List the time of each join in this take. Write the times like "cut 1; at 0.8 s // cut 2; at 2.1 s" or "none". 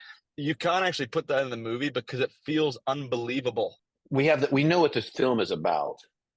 cut 1; at 3.8 s